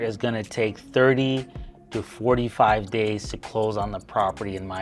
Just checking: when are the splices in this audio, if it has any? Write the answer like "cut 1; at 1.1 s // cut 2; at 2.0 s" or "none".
none